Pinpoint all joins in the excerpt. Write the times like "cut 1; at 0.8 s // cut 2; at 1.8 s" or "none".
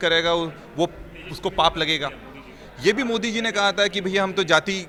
none

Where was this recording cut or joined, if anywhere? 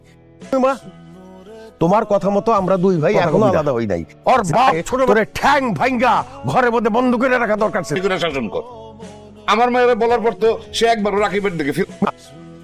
cut 1; at 5.1 s

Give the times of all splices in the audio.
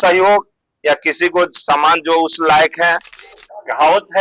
cut 1; at 3.1 s

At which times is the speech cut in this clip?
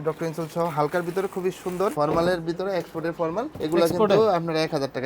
cut 1; at 1.9 s // cut 2; at 3.5 s

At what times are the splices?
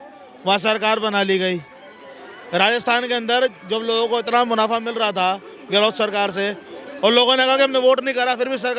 none

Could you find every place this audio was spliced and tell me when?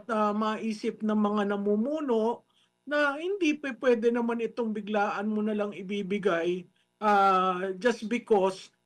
none

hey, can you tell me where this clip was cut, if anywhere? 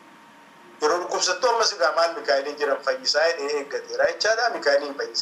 none

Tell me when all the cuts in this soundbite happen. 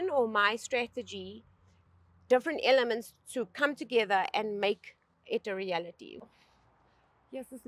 cut 1; at 6.0 s

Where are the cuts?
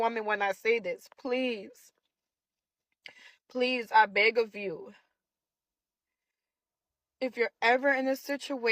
none

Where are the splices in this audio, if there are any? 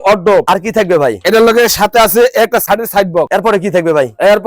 cut 1; at 3.1 s

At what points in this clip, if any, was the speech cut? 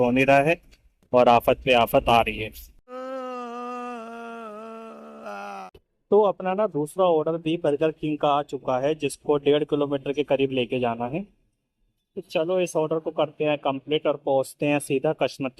none

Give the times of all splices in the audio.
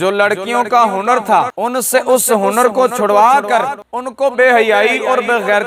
none

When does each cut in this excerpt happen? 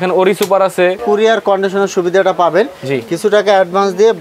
cut 1; at 1.0 s

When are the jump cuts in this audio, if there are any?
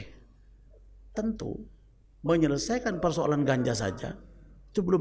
none

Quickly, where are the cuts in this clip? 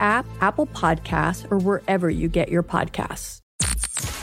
cut 1; at 3.3 s

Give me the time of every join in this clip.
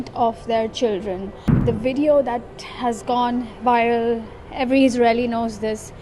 cut 1; at 1.6 s

